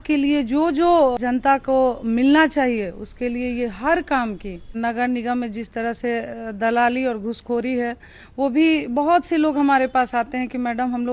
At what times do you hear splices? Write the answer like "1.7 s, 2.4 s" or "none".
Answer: 1.2 s, 4.8 s